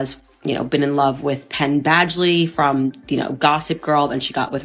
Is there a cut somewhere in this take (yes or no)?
no